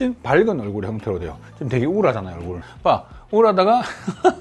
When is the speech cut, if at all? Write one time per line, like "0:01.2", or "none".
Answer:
0:02.6